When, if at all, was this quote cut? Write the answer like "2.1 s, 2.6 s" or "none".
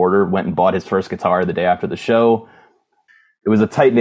2.8 s